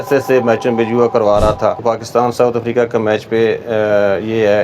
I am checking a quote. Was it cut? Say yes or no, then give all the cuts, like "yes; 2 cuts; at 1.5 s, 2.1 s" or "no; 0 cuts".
yes; 1 cut; at 1.8 s